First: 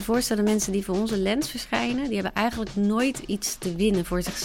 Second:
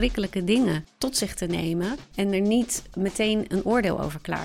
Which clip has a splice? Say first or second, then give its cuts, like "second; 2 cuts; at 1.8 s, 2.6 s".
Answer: second; 3 cuts; at 0.9 s, 2.0 s, 2.8 s